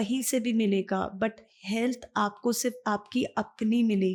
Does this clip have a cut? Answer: no; 0 cuts

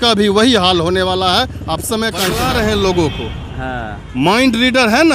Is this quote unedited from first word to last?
no; 1 cut; at 2.3 s

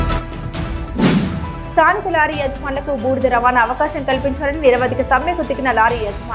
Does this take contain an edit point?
yes; 1 cut; at 1.0 s

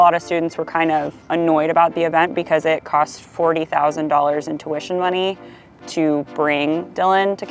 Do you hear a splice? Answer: no; 0 cuts

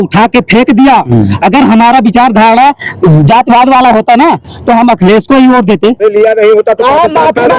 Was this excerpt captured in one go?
no; 1 cut; at 6.0 s

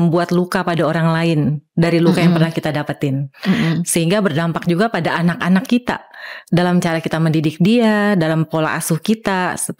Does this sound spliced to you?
no; 0 cuts

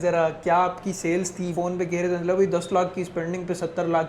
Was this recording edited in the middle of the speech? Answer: no; 0 cuts

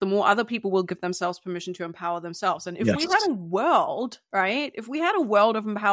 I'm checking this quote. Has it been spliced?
no; 0 cuts

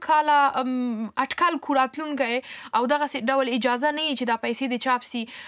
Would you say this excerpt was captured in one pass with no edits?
yes; 0 cuts

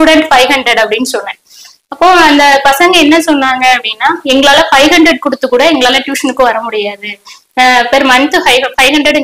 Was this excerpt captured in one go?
yes; 0 cuts

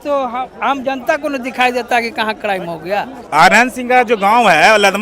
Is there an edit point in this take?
yes; 1 cut; at 3.2 s

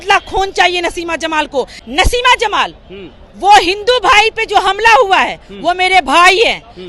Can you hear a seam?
yes; 1 cut; at 1.9 s

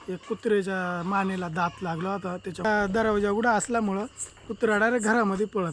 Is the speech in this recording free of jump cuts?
yes; 0 cuts

